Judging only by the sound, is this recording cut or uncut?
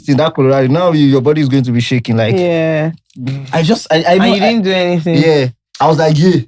uncut